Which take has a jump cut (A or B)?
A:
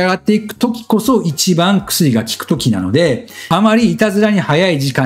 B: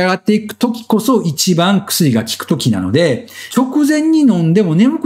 B